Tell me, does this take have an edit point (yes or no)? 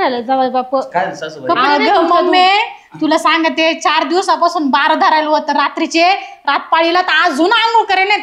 no